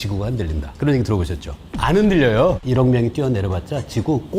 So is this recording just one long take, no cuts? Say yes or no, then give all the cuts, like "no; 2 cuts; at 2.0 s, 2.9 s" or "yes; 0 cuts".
no; 2 cuts; at 1.7 s, 2.6 s